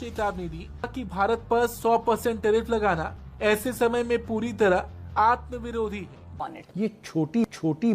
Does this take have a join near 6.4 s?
yes; 1 cut; at 6.4 s

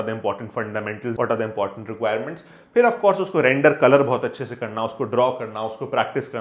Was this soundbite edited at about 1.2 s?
no; 0 cuts

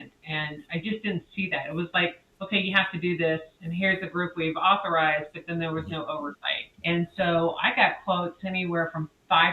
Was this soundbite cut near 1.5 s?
no; 1 cut; at 3.6 s

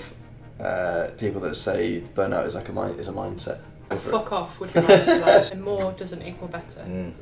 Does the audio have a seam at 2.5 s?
no; 2 cuts; at 3.9 s, 5.5 s

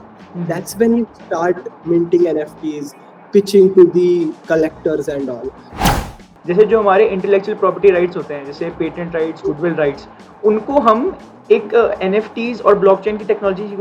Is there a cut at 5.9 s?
yes; 1 cut; at 5.9 s

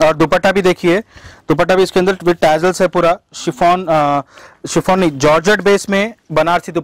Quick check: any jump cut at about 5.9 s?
no; 0 cuts

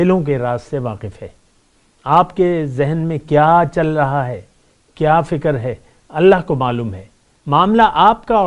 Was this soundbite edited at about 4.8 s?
no; 0 cuts

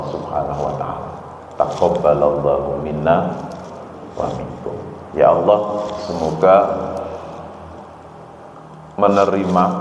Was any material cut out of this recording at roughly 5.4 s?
no; 0 cuts

